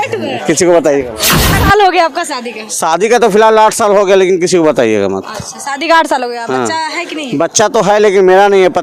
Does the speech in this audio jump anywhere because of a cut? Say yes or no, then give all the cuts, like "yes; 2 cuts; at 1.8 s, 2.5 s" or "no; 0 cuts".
yes; 1 cut; at 1.6 s